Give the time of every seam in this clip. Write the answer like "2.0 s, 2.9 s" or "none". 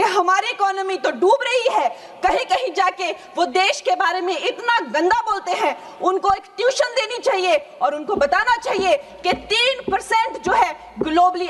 none